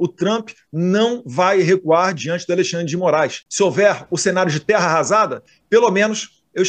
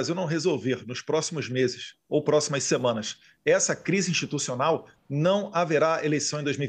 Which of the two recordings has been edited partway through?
first; 1 cut; at 3.4 s

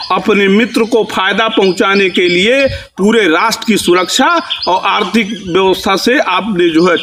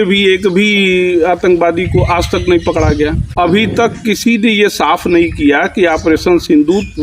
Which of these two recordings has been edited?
second; 1 cut; at 3.2 s

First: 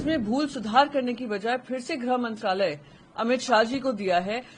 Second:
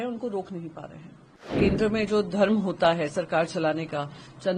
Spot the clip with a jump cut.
second; 1 cut; at 1.5 s

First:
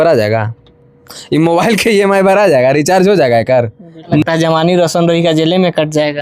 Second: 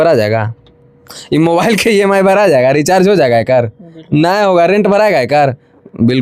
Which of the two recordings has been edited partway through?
first; 1 cut; at 4.2 s

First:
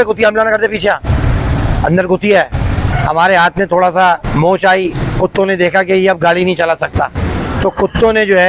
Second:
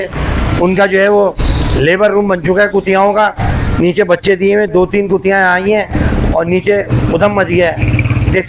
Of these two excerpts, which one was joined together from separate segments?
first; 1 cut; at 2.9 s

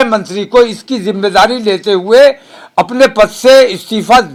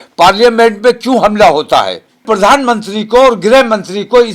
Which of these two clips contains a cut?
second; 1 cut; at 2.2 s

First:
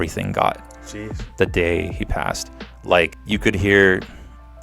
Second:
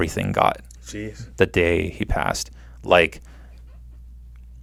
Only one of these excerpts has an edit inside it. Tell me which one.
first; 1 cut; at 3.2 s

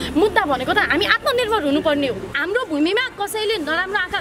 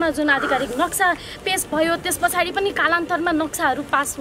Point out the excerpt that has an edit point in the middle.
first; 1 cut; at 2.3 s

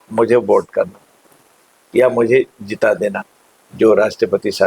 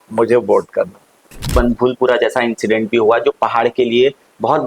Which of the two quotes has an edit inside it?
second; 1 cut; at 1.5 s

